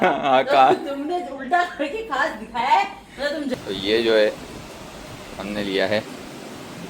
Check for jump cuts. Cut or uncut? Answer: cut